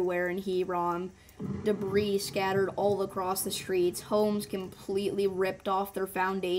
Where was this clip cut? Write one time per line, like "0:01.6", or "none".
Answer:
none